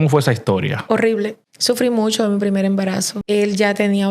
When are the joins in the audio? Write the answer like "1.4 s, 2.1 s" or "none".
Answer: 1.5 s, 3.1 s